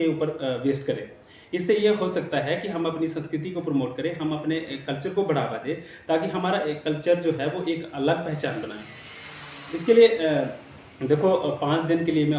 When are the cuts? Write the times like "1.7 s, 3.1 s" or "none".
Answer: none

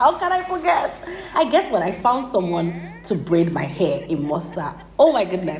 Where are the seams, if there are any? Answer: 1.3 s

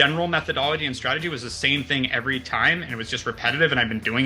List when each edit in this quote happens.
none

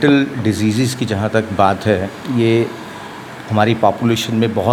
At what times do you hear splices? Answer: none

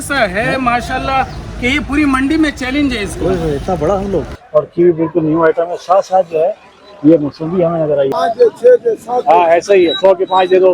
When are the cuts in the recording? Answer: 4.4 s, 8.1 s

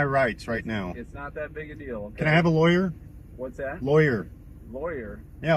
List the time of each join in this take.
none

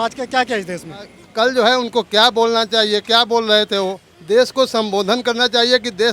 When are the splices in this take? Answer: 1.2 s, 4.1 s

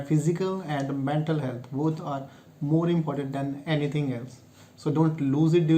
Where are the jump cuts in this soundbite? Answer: none

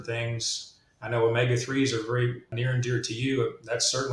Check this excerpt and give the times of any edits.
2.5 s

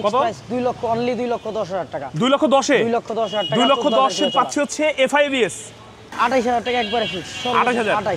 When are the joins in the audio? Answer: 6.0 s

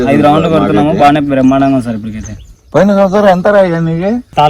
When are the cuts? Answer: none

